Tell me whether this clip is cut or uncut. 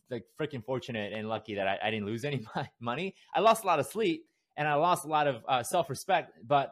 uncut